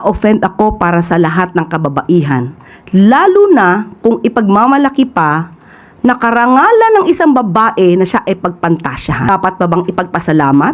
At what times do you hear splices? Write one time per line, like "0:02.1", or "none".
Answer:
0:09.3